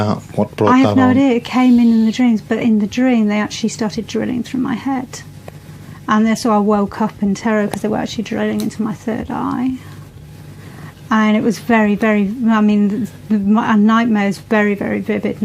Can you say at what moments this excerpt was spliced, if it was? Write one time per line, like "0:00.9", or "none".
0:10.7